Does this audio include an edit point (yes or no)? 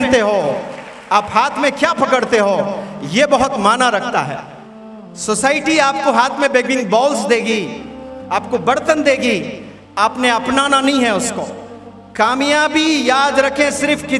no